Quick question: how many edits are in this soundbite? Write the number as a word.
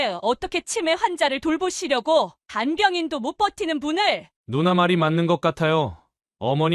one